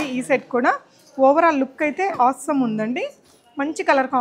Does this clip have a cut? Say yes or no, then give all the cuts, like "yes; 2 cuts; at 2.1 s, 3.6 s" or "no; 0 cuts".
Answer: no; 0 cuts